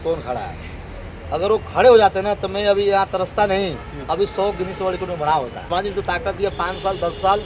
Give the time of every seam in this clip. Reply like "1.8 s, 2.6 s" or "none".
5.7 s